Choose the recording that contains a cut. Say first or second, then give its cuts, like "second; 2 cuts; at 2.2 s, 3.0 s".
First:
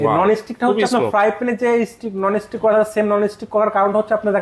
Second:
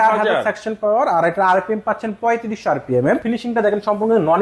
second; 1 cut; at 3.2 s